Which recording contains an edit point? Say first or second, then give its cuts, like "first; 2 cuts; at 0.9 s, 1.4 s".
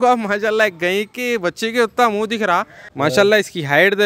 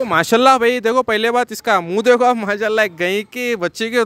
first; 1 cut; at 2.8 s